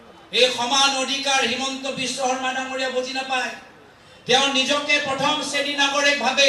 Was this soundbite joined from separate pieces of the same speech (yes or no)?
no